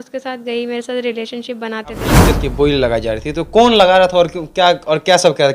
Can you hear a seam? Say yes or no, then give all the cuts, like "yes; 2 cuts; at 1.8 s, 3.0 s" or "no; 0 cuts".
yes; 1 cut; at 2.2 s